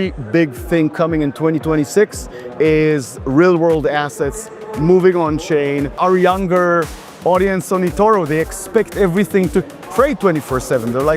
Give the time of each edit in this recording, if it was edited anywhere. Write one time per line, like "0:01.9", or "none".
0:06.0